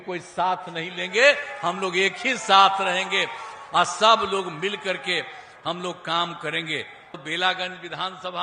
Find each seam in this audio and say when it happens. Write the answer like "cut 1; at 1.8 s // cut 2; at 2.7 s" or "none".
cut 1; at 7.1 s